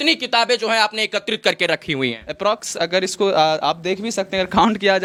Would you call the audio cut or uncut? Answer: uncut